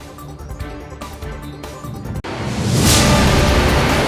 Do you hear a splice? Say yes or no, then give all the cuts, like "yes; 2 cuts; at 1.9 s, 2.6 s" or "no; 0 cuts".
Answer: yes; 1 cut; at 2.2 s